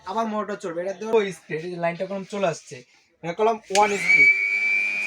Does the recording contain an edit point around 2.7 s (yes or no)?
no